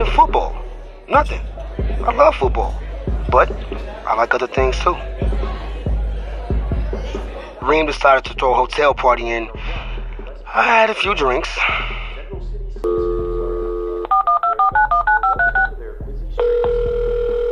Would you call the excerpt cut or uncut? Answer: cut